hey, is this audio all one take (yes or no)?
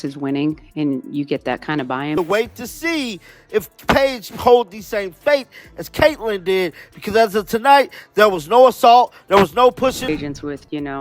no